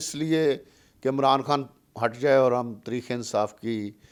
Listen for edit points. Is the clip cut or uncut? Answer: uncut